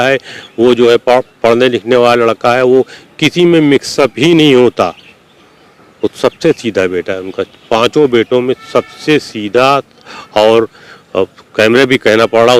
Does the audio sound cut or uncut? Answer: uncut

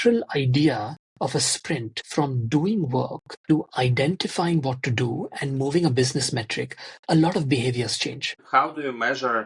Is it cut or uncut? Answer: cut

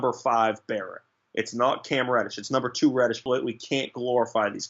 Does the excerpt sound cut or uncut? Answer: cut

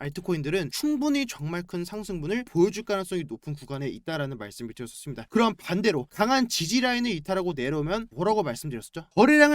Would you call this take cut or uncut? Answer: cut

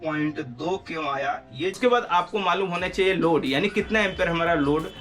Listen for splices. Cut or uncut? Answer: cut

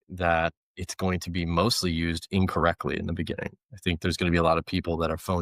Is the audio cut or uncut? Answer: uncut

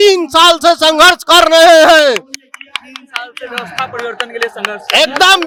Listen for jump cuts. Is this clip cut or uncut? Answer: uncut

